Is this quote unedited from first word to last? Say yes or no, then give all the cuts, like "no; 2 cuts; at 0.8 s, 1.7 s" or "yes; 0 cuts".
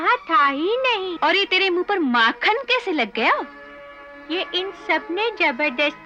yes; 0 cuts